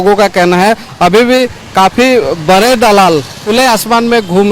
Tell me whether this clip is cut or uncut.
cut